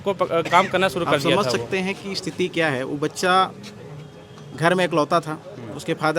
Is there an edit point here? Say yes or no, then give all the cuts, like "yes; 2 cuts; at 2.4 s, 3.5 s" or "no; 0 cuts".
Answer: yes; 1 cut; at 1.4 s